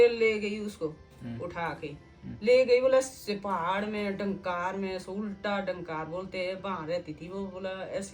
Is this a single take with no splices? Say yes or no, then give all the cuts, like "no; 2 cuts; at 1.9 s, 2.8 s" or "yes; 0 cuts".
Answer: yes; 0 cuts